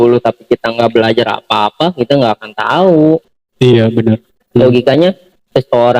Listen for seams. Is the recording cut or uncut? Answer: cut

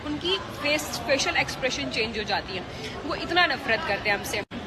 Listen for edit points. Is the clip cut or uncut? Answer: uncut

